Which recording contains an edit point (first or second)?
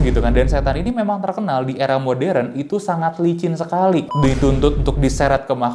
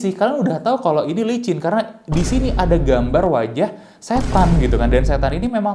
first